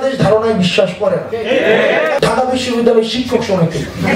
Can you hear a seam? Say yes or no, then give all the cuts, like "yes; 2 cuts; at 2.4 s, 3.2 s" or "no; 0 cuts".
yes; 2 cuts; at 1.3 s, 2.2 s